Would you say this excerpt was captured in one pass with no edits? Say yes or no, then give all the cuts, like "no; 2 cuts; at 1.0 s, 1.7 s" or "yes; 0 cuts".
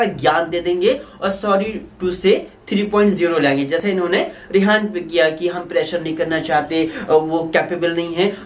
yes; 0 cuts